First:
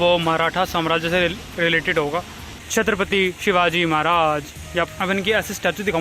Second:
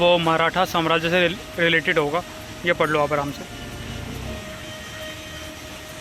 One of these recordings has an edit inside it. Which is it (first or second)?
first